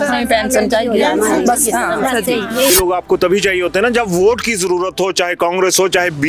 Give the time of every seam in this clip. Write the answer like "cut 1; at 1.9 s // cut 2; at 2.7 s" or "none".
cut 1; at 2.7 s